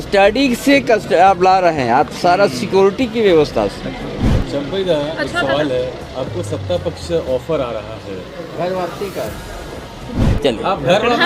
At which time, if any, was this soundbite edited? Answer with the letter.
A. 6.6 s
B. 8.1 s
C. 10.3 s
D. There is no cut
C